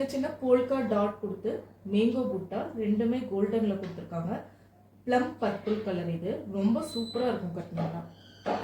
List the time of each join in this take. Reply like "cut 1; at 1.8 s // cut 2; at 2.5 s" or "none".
none